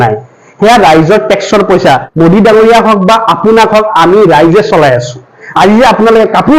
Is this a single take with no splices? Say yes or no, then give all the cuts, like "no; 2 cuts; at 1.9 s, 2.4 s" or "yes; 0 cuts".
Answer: no; 1 cut; at 2.1 s